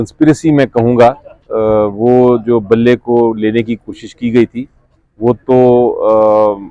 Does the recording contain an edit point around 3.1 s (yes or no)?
no